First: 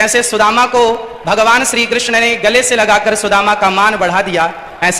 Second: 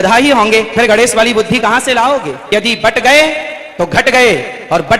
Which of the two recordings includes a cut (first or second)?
second